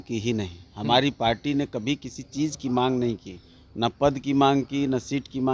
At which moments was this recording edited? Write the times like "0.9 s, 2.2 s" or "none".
none